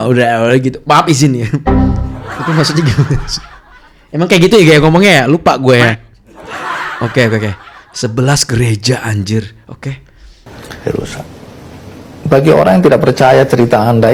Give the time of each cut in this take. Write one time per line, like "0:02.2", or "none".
none